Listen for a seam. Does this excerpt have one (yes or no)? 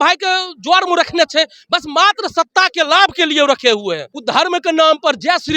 yes